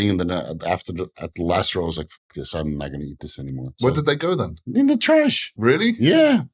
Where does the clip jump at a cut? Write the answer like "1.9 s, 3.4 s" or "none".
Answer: 3.7 s, 4.6 s, 5.5 s